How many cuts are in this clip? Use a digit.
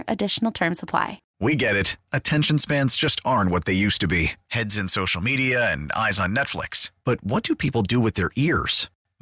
1